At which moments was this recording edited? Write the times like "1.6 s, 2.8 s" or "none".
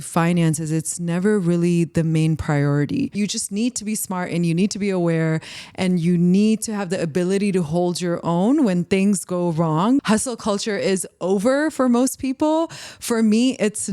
3.2 s, 10.0 s